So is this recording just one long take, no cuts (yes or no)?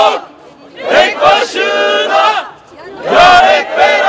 yes